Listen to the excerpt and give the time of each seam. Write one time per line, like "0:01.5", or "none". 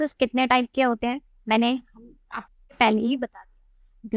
none